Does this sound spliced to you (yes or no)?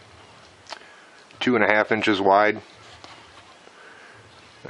no